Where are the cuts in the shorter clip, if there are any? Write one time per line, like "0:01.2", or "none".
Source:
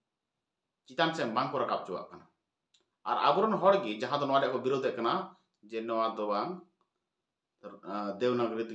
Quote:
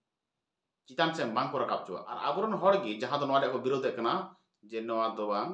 0:02.1